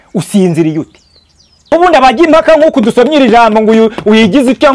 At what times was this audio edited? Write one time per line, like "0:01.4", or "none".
0:01.7